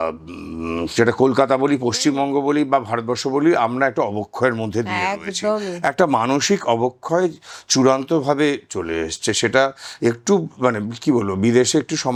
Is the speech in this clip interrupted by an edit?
no; 0 cuts

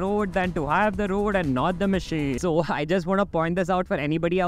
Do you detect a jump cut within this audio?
yes; 1 cut; at 2.4 s

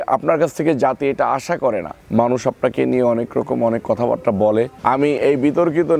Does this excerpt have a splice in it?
yes; 2 cuts; at 2.0 s, 4.8 s

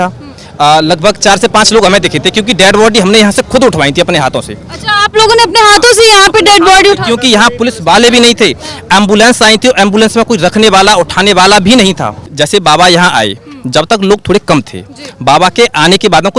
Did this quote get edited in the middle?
no; 0 cuts

